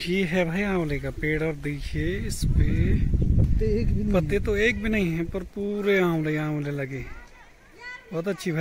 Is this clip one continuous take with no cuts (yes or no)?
yes